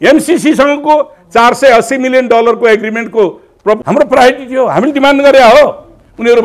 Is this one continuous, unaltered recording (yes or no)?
no